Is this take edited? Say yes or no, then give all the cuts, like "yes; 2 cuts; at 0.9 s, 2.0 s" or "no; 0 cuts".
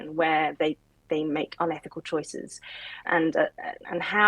yes; 1 cut; at 3.0 s